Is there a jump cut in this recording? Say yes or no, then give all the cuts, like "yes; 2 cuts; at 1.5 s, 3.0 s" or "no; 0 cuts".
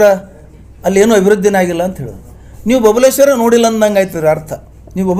no; 0 cuts